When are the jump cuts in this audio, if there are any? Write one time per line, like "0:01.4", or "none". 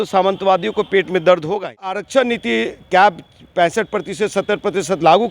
0:02.0